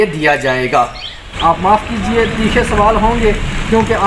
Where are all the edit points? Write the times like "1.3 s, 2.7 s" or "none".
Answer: 1.2 s